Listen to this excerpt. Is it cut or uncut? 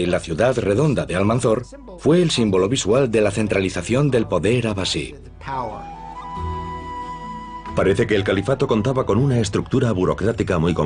cut